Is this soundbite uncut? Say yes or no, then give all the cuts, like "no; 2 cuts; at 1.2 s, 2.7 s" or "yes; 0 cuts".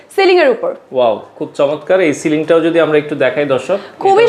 yes; 0 cuts